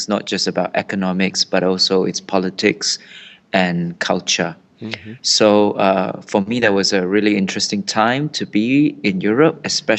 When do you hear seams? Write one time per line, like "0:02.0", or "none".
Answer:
0:06.4